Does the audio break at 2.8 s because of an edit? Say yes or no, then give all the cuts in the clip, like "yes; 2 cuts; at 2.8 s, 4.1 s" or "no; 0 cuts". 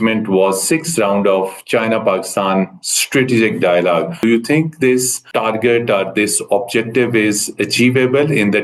no; 2 cuts; at 4.2 s, 5.2 s